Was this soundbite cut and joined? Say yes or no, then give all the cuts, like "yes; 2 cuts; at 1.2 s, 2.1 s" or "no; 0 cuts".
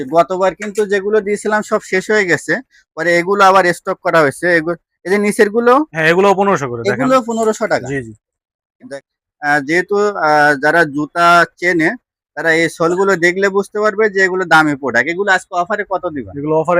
yes; 1 cut; at 8.9 s